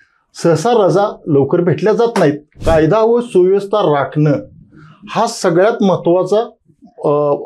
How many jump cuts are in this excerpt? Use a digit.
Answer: 1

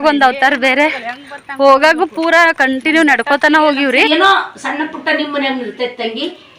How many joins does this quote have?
1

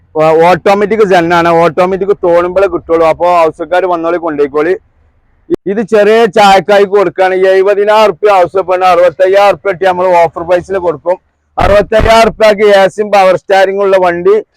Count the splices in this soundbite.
1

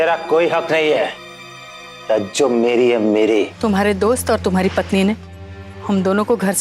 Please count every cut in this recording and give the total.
1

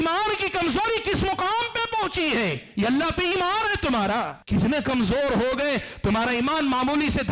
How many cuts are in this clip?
1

